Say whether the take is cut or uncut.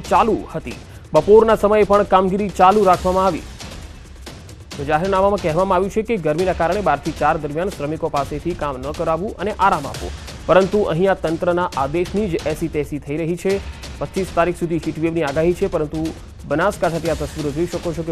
uncut